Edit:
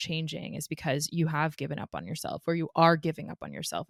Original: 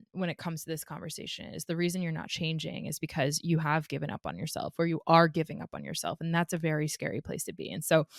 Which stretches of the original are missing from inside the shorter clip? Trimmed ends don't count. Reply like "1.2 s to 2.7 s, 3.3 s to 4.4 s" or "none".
none